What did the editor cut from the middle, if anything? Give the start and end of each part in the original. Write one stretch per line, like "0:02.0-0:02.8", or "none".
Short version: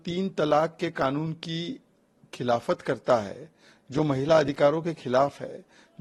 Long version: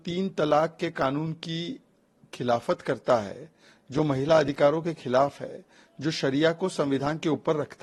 none